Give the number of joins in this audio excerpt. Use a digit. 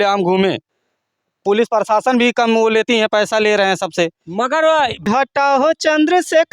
1